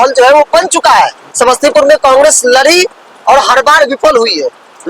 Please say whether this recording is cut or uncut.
cut